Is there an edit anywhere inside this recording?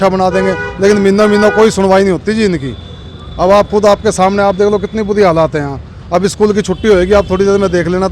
no; 0 cuts

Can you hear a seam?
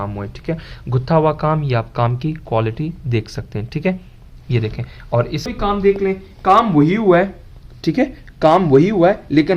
yes; 1 cut; at 5.5 s

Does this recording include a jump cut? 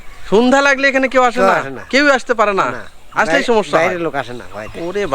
no; 0 cuts

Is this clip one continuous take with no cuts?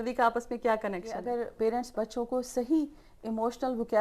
no; 1 cut; at 1.2 s

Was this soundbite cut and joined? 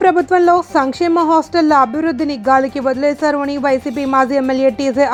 no; 0 cuts

